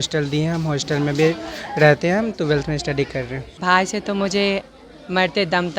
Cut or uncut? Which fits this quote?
cut